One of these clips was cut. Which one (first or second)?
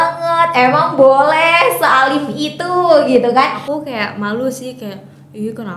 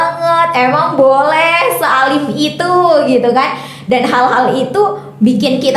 first